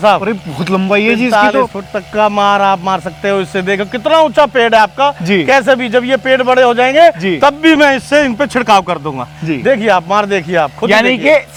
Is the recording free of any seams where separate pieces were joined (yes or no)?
yes